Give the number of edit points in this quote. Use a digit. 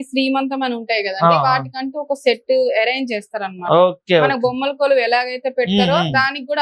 0